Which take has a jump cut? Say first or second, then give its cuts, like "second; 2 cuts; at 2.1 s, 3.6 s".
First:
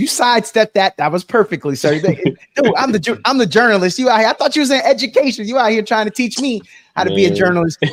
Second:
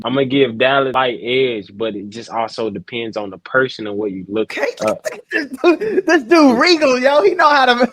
second; 2 cuts; at 0.9 s, 4.5 s